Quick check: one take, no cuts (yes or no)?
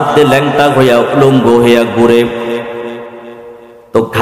yes